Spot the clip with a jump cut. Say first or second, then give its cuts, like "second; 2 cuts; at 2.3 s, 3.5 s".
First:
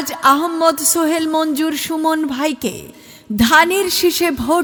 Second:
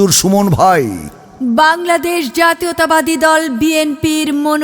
second; 1 cut; at 1.3 s